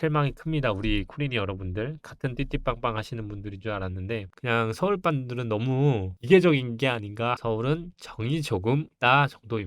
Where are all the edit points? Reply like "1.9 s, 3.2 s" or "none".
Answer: 4.3 s, 7.3 s